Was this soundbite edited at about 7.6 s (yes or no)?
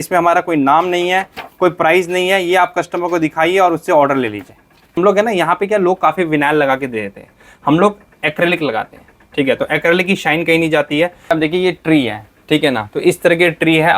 no